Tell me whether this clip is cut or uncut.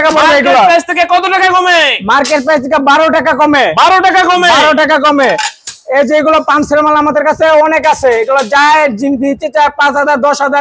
uncut